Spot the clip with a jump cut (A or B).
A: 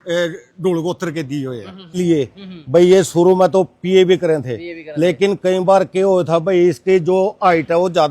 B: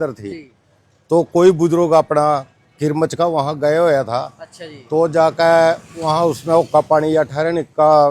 A